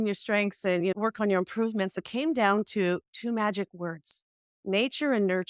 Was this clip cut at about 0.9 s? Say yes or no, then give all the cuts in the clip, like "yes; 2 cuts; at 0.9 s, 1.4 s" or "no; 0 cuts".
yes; 2 cuts; at 0.9 s, 2.0 s